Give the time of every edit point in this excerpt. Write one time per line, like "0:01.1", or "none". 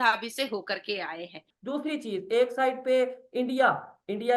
0:01.5